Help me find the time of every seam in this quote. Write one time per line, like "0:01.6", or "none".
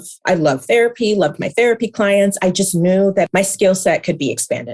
0:03.3